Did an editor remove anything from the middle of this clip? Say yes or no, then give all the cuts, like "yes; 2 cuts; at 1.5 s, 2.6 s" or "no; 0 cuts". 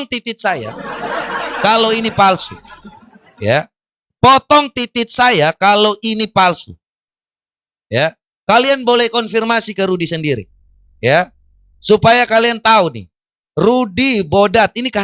no; 0 cuts